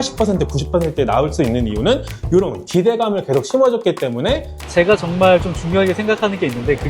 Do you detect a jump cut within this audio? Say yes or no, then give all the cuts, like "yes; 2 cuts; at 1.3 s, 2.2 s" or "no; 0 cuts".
yes; 1 cut; at 4.6 s